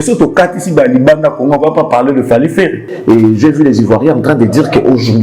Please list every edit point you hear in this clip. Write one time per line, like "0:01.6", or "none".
0:02.9